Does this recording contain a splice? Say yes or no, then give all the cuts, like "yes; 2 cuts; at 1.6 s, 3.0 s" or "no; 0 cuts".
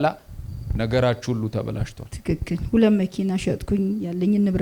no; 0 cuts